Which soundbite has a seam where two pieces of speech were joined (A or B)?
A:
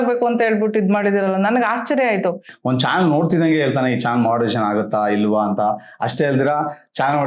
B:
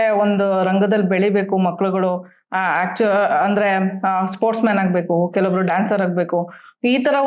A